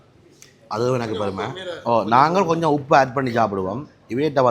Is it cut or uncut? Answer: cut